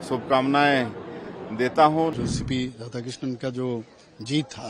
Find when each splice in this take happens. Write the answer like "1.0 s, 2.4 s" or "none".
2.1 s